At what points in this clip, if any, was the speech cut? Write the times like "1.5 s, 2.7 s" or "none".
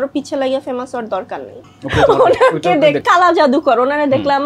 1.6 s, 3.0 s